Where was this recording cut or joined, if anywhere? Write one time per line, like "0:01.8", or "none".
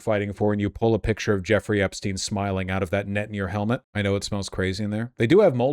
0:03.9